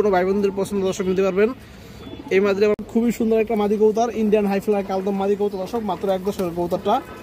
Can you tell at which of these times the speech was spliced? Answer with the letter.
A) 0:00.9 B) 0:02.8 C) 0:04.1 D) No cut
B